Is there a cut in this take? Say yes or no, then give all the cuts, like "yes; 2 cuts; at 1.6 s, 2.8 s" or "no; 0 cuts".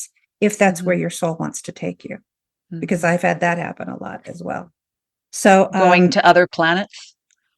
no; 0 cuts